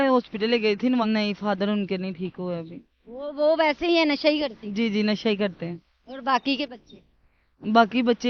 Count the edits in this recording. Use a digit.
1